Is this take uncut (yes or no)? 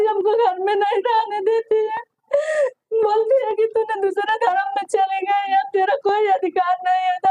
yes